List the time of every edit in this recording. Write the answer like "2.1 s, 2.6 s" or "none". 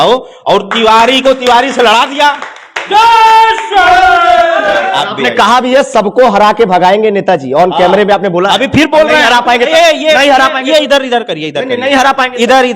4.8 s